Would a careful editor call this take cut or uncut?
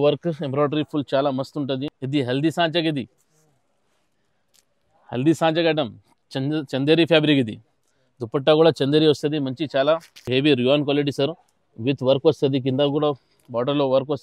cut